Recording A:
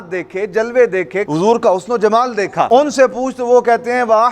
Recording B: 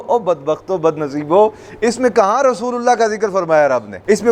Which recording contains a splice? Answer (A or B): A